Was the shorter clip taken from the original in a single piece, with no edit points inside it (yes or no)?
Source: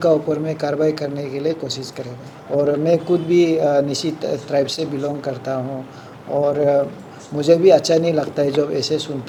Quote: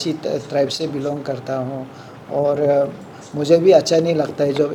yes